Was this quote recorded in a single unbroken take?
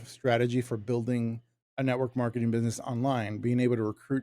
yes; 0 cuts

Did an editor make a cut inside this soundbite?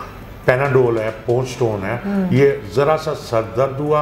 no; 0 cuts

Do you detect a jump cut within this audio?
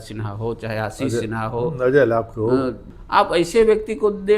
yes; 1 cut; at 2.8 s

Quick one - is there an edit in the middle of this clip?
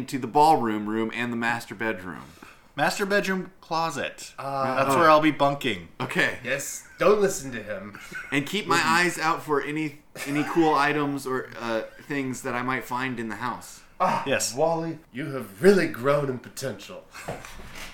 no; 0 cuts

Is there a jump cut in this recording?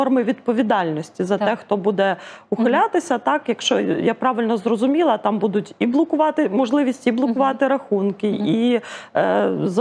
no; 0 cuts

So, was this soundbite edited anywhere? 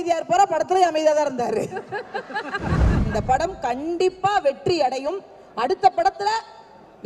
yes; 1 cut; at 2.9 s

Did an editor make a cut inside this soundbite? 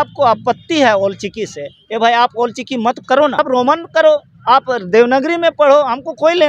yes; 1 cut; at 3.4 s

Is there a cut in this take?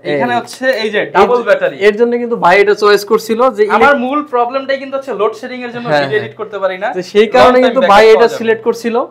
no; 0 cuts

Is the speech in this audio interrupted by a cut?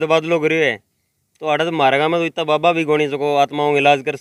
no; 0 cuts

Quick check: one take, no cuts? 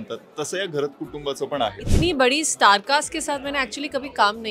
no; 1 cut; at 1.9 s

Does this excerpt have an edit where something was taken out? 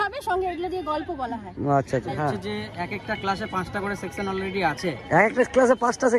yes; 1 cut; at 2.2 s

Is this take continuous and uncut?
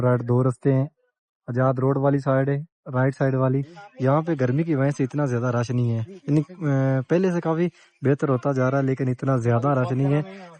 no; 1 cut; at 3.8 s

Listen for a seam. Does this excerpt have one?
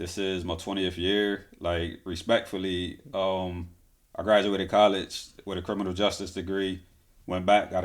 no; 0 cuts

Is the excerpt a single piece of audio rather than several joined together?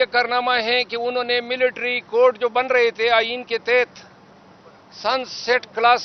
yes; 0 cuts

